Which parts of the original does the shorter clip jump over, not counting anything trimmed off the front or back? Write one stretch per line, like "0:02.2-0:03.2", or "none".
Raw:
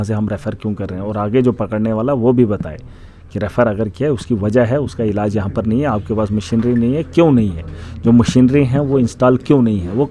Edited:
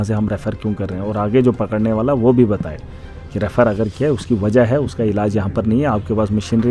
none